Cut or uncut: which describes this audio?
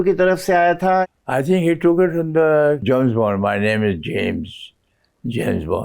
cut